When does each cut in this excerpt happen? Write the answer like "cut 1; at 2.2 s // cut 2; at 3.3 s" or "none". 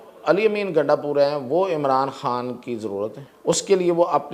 cut 1; at 3.3 s

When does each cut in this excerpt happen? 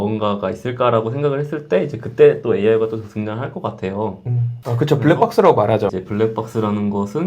cut 1; at 4.5 s // cut 2; at 5.9 s

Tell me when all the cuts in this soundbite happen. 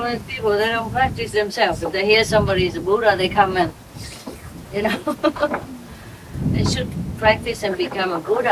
none

